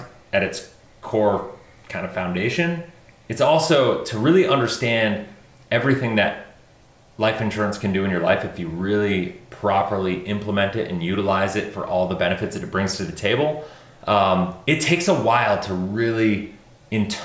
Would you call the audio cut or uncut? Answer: uncut